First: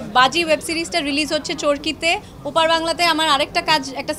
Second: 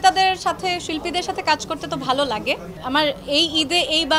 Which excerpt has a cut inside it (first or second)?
second